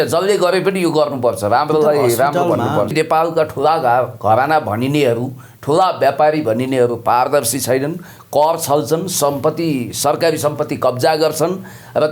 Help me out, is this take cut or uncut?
cut